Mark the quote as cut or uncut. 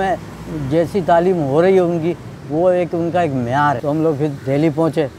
cut